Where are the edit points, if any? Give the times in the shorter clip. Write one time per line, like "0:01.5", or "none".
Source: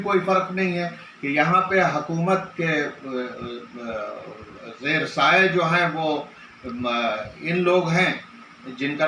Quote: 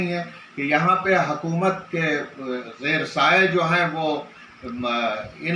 0:02.7